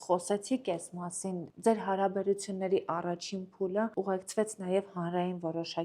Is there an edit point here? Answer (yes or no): yes